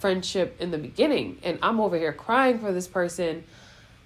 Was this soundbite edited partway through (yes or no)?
no